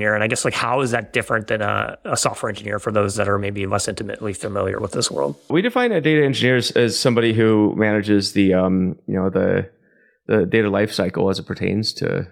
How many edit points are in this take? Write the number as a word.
one